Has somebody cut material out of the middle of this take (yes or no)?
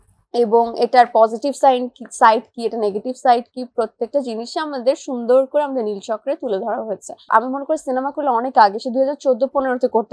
yes